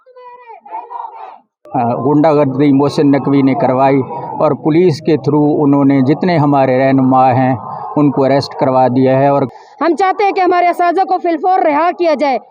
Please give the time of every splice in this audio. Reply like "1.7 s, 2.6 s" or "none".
1.6 s, 9.5 s